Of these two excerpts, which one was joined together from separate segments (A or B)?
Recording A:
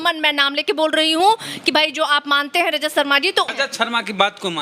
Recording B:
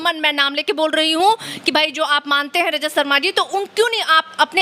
A